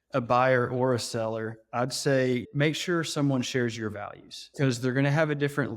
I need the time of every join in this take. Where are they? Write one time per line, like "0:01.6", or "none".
0:02.5
0:04.5